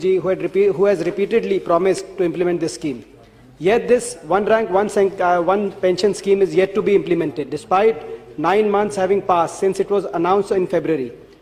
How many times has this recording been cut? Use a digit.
0